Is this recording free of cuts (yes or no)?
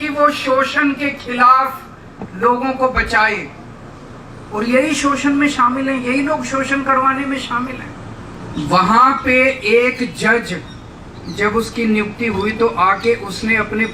no